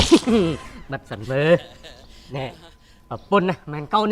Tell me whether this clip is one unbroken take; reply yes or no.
yes